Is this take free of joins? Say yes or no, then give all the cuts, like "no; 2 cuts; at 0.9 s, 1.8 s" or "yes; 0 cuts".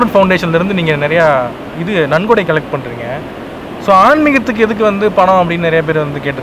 yes; 0 cuts